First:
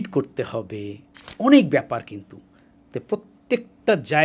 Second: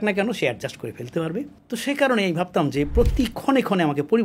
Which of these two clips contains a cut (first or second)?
second